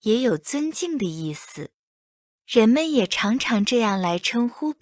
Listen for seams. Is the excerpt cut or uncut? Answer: uncut